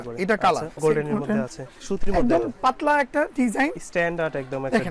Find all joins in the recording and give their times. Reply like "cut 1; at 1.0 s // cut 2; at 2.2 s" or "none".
cut 1; at 0.8 s // cut 2; at 1.7 s